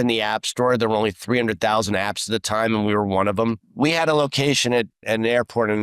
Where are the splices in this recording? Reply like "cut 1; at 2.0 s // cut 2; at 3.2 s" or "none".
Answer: cut 1; at 3.7 s // cut 2; at 5.0 s